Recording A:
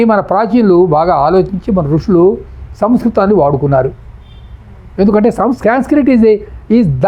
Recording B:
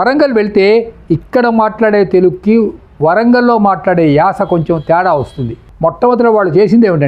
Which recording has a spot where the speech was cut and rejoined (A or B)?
B